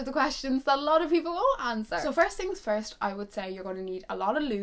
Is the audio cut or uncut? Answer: uncut